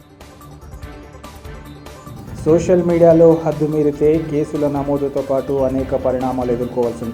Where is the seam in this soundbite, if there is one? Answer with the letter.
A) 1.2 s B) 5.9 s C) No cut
A